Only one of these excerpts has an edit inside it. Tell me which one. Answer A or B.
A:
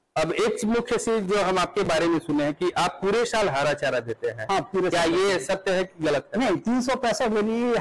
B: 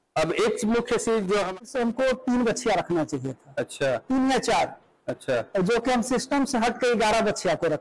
B